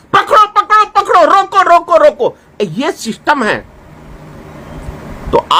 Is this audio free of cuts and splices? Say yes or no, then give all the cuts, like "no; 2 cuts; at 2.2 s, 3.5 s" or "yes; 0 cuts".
yes; 0 cuts